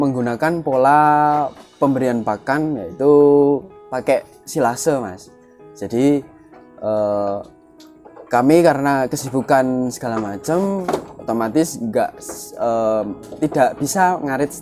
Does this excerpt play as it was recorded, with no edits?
no; 1 cut; at 3.9 s

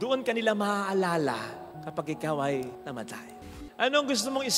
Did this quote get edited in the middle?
yes; 1 cut; at 3.5 s

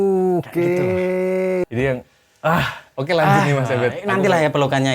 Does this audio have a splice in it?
yes; 1 cut; at 1.6 s

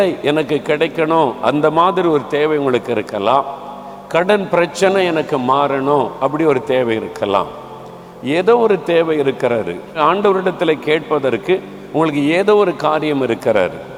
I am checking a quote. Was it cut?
no; 0 cuts

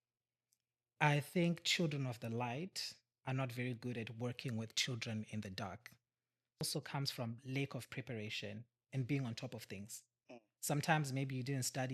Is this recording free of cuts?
no; 1 cut; at 6.6 s

